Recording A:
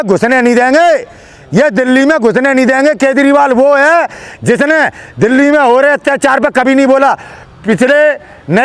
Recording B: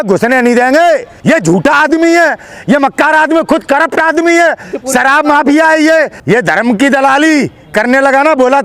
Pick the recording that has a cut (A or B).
B